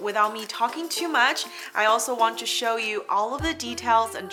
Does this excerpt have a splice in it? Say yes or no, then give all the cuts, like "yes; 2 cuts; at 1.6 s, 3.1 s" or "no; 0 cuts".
no; 0 cuts